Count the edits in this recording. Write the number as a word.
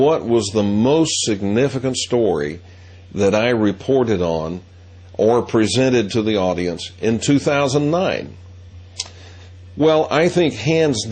one